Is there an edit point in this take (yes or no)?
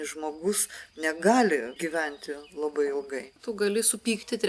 yes